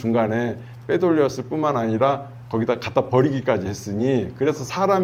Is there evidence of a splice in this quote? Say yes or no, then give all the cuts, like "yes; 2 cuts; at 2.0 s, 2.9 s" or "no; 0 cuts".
no; 0 cuts